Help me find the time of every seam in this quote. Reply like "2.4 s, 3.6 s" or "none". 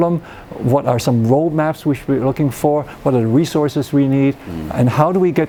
none